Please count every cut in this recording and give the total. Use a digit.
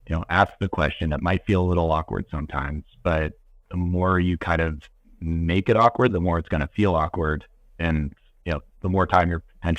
0